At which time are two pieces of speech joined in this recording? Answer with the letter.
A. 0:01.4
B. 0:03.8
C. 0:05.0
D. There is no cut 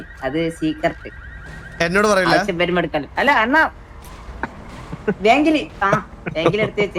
D